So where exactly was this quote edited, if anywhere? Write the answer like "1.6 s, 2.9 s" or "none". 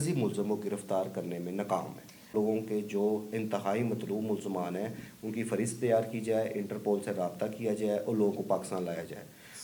2.3 s